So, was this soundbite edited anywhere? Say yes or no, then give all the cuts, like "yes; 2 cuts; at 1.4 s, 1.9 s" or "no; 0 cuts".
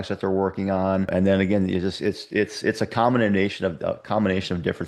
yes; 1 cut; at 1.1 s